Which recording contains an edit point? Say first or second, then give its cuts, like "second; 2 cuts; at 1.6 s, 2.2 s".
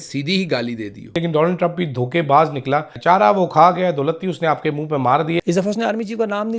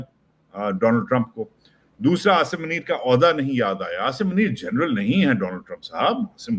first; 3 cuts; at 1.1 s, 2.9 s, 5.4 s